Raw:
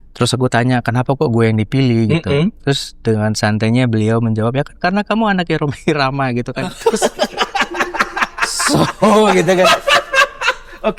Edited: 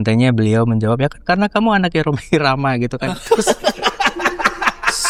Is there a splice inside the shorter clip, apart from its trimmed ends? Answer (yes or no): no